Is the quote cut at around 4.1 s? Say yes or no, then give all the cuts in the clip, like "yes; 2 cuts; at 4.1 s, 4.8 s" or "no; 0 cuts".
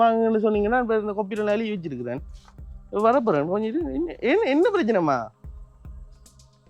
no; 1 cut; at 5.4 s